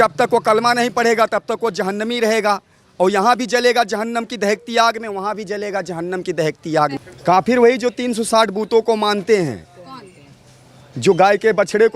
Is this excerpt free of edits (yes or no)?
no